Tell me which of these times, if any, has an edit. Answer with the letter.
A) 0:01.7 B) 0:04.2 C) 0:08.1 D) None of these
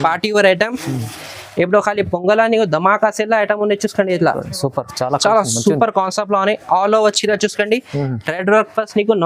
D